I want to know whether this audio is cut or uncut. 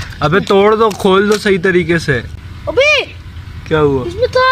cut